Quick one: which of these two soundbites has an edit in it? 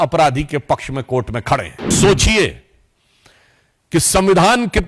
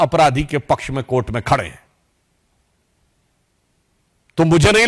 first; 1 cut; at 1.9 s

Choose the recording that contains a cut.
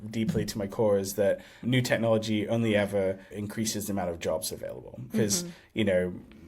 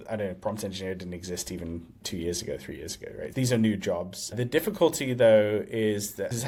first; 1 cut; at 3.3 s

